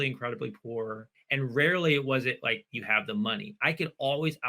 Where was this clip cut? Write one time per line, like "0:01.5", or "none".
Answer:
0:01.1